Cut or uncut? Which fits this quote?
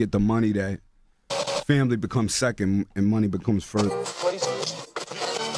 cut